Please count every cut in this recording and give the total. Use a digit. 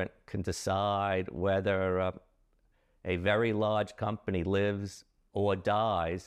0